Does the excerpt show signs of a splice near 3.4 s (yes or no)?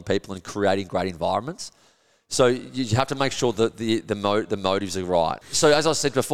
no